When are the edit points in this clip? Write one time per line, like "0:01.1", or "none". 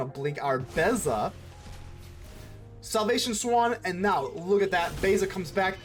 none